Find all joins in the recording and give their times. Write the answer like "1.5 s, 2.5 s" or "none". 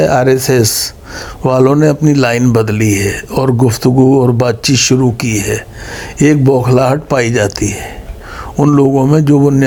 none